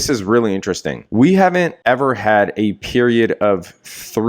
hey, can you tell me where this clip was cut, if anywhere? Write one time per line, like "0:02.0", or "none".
0:01.0
0:01.8